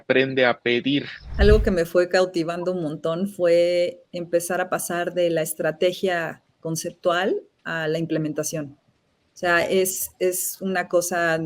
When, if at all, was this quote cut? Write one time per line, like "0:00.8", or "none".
0:01.2